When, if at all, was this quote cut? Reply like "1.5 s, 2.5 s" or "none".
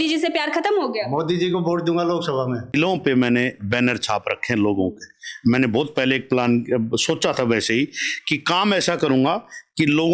2.7 s

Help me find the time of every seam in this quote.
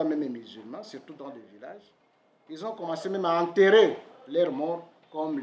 none

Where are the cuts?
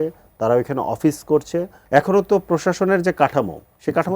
1.8 s

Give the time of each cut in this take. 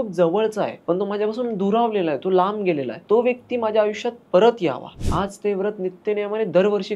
0.8 s, 3.0 s, 4.9 s

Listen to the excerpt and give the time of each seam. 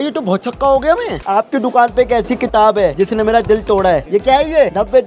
1.2 s, 4.0 s

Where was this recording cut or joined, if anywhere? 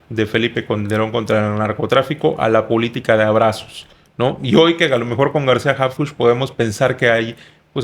none

